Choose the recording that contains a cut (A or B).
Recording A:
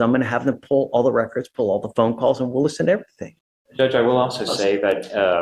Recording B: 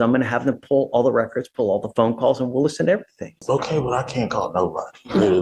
B